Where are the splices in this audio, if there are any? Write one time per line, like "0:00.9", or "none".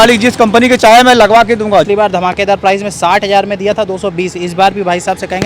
0:01.9